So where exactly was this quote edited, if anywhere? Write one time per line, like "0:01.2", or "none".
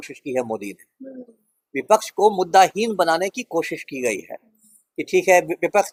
none